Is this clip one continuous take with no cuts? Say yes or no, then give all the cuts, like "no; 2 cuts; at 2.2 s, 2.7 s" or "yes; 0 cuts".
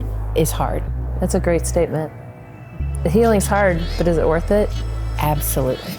no; 1 cut; at 1.0 s